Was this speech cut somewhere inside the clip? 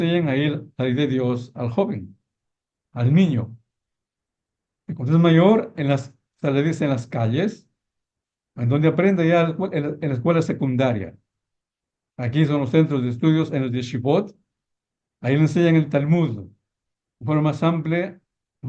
no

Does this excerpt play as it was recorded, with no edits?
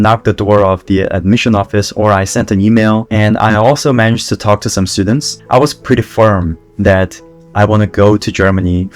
no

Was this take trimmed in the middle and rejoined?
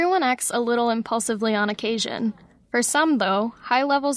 no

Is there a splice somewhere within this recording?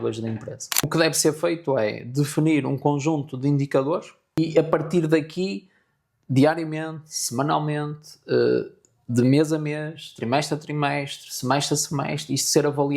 yes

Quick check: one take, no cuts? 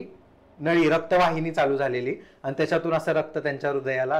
yes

